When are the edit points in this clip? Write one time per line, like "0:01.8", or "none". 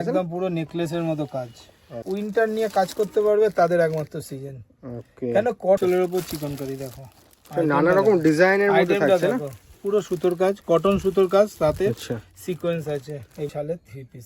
0:01.9
0:05.8
0:13.5